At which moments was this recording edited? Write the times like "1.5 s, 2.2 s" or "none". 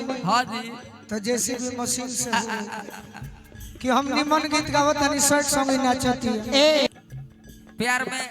6.9 s